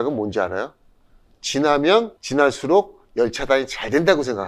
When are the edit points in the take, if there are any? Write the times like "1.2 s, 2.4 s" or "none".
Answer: 2.2 s